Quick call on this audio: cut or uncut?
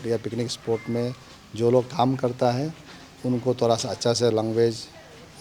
uncut